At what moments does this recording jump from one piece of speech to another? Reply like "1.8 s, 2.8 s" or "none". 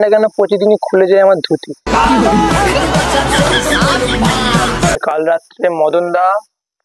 5.0 s